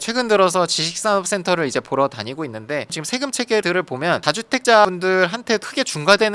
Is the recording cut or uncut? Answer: cut